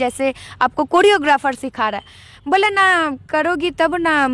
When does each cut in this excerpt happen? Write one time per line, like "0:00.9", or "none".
none